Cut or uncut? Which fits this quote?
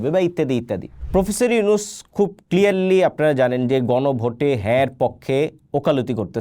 cut